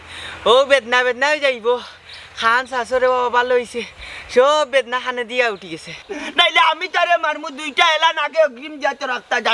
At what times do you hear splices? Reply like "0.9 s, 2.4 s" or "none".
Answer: 6.0 s

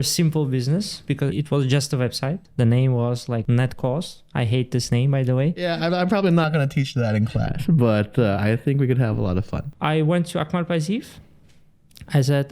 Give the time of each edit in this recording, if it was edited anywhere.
1.3 s, 2.5 s, 3.4 s, 5.6 s, 9.6 s

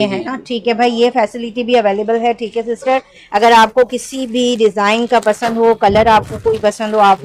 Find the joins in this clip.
none

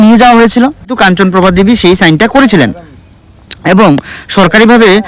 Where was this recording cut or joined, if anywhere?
0.9 s

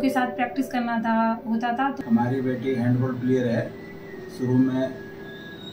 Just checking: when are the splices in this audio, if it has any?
2.0 s

